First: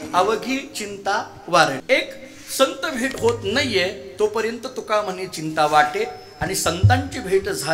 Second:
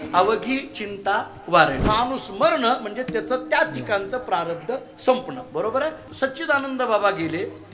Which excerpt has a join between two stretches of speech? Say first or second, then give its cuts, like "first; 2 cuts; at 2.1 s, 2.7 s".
second; 2 cuts; at 1.8 s, 6.0 s